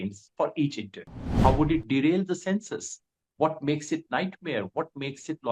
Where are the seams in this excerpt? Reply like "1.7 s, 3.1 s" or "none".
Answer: 1.3 s